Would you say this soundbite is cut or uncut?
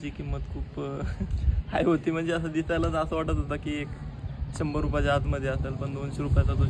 uncut